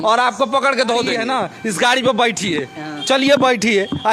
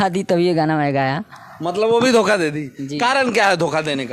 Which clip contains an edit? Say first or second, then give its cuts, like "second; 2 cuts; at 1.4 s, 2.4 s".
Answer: first; 1 cut; at 1.1 s